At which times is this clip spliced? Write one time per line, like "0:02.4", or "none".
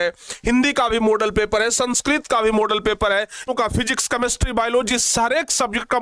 0:03.5